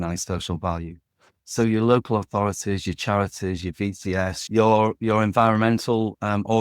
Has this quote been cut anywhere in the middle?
yes; 1 cut; at 4.4 s

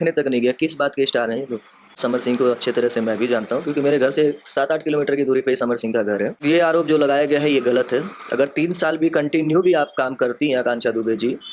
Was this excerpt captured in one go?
no; 2 cuts; at 1.9 s, 6.4 s

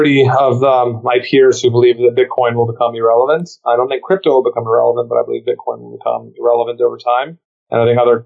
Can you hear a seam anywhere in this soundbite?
no; 0 cuts

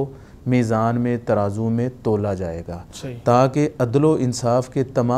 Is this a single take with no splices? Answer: yes; 0 cuts

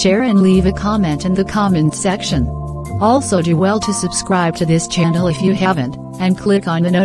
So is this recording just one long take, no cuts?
yes; 0 cuts

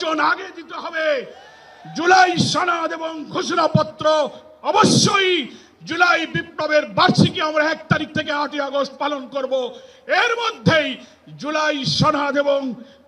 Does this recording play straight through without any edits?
yes; 0 cuts

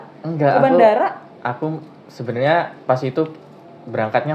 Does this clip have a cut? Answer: no; 0 cuts

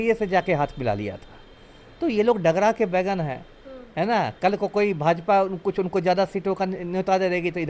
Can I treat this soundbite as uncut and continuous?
yes; 0 cuts

